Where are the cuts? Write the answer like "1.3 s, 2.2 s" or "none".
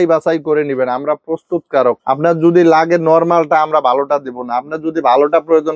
none